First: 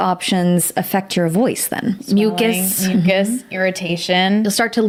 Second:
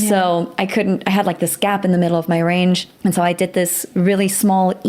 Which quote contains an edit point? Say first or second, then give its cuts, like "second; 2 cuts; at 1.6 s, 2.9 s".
second; 1 cut; at 2.9 s